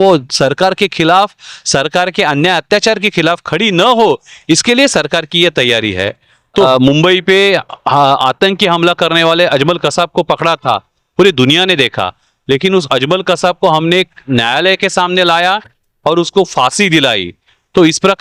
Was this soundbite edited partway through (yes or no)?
yes